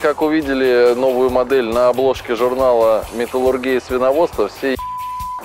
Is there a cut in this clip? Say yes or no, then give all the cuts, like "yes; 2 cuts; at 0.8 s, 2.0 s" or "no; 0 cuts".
no; 0 cuts